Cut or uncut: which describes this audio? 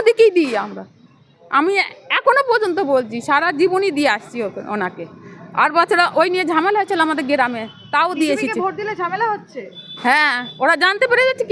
uncut